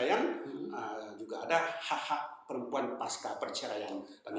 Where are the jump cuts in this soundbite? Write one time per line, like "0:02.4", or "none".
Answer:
none